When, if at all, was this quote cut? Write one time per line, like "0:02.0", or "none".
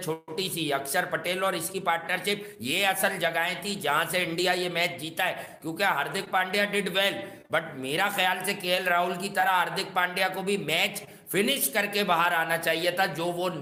none